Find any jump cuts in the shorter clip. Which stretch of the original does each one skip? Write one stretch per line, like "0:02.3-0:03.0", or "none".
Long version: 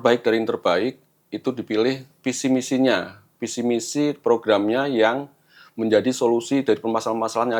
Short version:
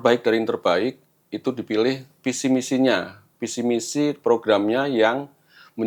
none

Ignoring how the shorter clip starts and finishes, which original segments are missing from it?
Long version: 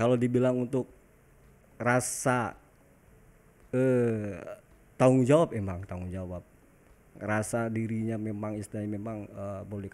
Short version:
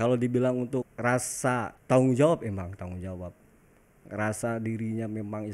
0:00.9-0:01.7
0:02.6-0:04.8

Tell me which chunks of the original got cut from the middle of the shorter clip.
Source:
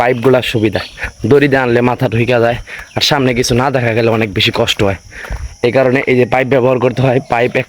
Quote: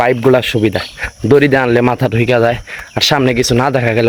none

